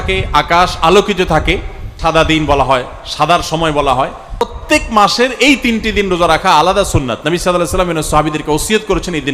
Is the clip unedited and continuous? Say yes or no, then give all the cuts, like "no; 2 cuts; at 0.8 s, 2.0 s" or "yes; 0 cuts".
no; 2 cuts; at 1.9 s, 4.6 s